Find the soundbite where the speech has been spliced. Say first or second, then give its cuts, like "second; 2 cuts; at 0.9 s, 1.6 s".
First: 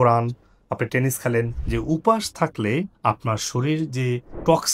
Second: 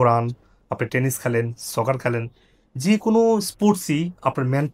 first; 1 cut; at 1.6 s